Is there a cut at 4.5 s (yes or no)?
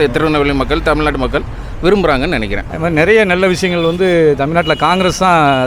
no